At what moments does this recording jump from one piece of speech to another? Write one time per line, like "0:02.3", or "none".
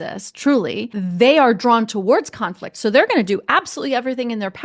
0:00.9